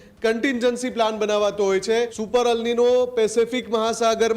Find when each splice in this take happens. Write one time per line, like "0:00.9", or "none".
0:02.2